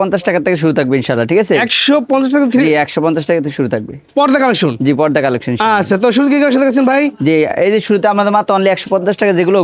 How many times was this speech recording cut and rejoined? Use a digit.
0